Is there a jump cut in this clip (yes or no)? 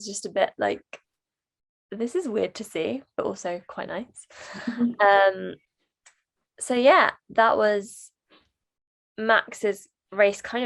no